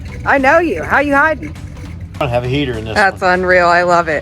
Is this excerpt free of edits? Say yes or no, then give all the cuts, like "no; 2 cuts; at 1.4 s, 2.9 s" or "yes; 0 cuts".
no; 1 cut; at 2.2 s